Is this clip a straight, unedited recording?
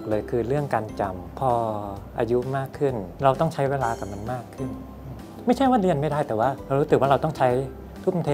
no; 3 cuts; at 1.4 s, 3.2 s, 6.6 s

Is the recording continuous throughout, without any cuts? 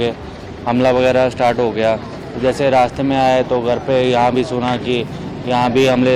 yes; 0 cuts

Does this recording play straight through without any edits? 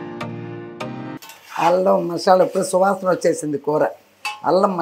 no; 1 cut; at 1.2 s

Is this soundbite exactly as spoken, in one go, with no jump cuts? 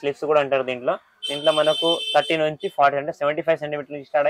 yes; 0 cuts

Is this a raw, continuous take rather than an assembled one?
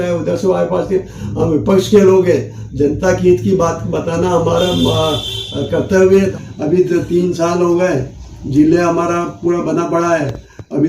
no; 1 cut; at 6.3 s

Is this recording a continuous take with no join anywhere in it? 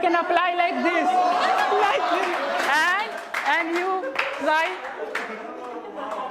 yes; 0 cuts

